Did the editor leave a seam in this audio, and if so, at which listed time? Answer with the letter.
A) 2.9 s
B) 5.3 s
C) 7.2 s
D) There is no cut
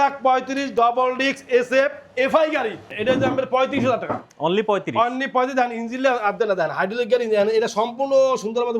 A